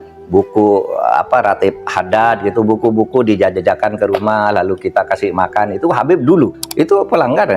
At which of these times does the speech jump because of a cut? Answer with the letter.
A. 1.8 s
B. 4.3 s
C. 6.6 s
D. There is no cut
C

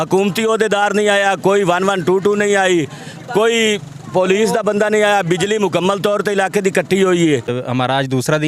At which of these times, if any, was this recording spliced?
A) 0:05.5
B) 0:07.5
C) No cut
B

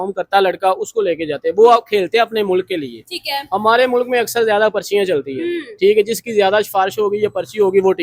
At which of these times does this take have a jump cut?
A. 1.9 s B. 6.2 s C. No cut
C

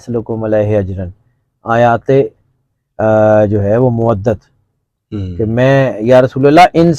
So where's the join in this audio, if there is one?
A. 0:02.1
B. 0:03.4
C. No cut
C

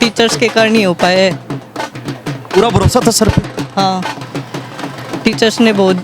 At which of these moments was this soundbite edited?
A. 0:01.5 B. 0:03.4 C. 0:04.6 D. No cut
D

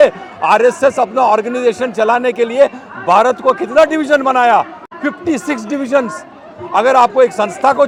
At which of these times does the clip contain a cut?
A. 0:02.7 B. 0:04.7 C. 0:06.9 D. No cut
D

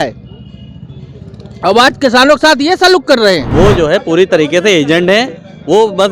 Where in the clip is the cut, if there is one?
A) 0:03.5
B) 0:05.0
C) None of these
A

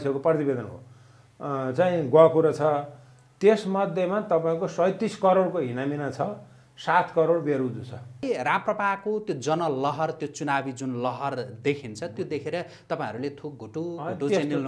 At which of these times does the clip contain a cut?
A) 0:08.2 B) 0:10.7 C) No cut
A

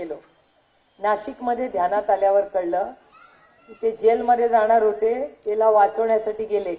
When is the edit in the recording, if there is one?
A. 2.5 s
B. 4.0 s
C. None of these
C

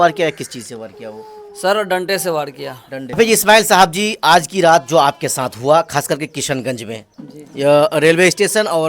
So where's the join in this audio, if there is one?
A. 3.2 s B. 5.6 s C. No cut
A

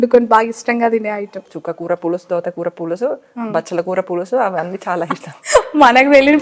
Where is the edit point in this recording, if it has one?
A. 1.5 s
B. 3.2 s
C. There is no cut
A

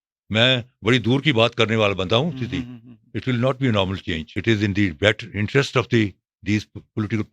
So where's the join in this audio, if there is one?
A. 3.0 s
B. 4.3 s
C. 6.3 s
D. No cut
B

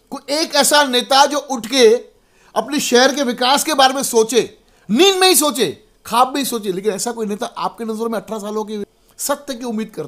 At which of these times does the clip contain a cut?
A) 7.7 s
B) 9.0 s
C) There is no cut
B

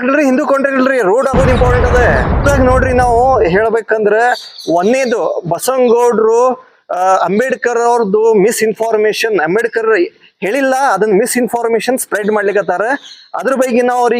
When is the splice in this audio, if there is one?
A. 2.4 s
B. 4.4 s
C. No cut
A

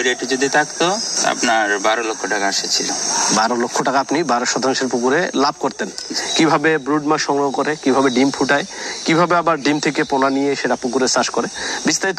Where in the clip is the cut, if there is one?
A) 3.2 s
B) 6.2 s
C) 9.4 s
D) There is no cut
B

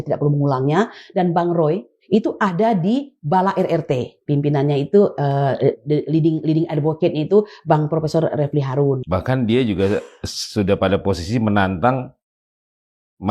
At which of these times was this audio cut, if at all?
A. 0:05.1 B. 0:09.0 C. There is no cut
B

